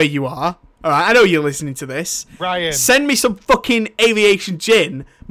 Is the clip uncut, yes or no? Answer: yes